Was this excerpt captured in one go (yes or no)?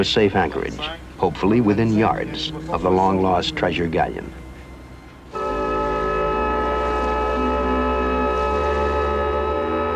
yes